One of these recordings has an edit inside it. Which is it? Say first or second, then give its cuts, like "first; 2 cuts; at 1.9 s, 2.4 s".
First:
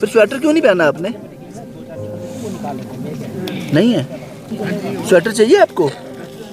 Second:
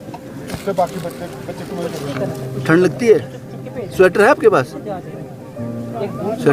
first; 1 cut; at 4.5 s